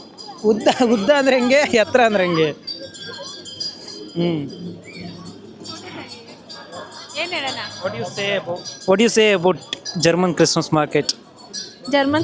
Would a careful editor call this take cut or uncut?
uncut